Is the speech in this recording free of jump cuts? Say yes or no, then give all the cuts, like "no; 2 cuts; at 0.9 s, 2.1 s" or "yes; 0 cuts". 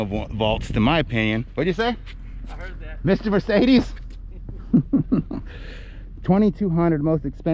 yes; 0 cuts